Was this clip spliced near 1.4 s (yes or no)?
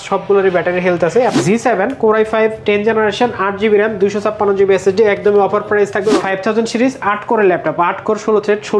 yes